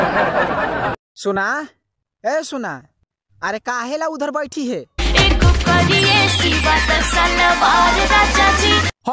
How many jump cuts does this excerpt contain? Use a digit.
1